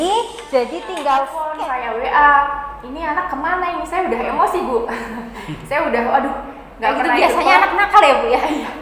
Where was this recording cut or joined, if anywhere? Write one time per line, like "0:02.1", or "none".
0:01.5